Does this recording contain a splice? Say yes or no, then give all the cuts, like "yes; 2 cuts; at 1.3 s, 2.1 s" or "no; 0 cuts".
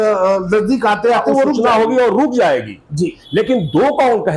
no; 0 cuts